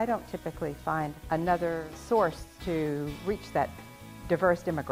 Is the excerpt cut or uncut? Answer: cut